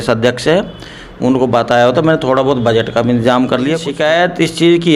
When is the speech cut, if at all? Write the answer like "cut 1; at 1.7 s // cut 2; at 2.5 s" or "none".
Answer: cut 1; at 3.9 s